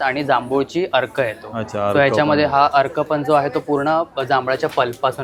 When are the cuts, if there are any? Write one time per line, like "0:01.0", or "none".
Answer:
none